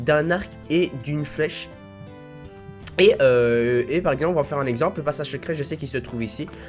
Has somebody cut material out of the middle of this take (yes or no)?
no